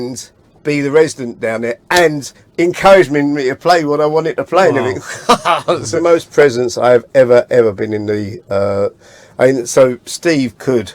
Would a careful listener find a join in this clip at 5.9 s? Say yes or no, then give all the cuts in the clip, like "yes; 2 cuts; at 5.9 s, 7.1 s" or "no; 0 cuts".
yes; 1 cut; at 5.9 s